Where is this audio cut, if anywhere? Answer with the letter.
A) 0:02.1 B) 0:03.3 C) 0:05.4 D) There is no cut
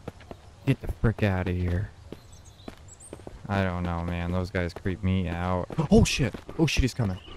B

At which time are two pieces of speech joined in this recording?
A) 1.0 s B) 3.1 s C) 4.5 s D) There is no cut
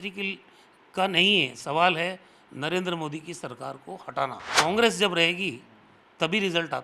C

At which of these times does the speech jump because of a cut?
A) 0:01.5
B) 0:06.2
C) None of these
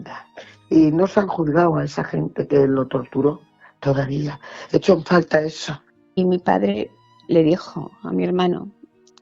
B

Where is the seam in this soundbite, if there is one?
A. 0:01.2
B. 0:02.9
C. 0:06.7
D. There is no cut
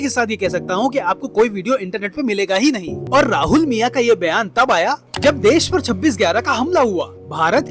B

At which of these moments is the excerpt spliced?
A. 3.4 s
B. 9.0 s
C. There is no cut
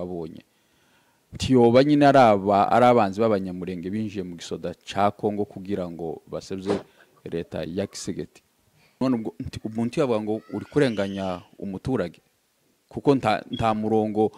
B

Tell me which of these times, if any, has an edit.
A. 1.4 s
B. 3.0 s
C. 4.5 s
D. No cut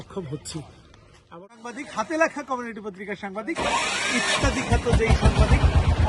A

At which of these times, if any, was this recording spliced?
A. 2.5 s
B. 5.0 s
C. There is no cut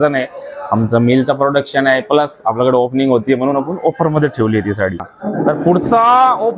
C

